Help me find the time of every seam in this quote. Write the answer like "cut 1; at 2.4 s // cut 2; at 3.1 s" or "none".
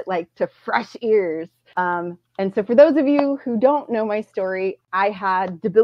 cut 1; at 1.6 s // cut 2; at 4.8 s